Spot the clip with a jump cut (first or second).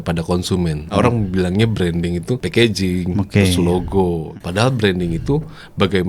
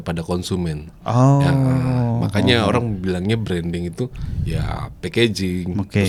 first